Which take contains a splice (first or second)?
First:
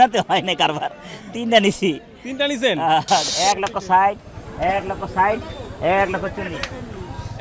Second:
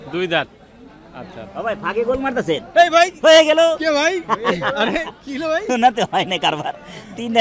first